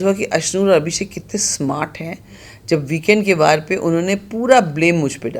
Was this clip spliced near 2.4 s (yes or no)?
no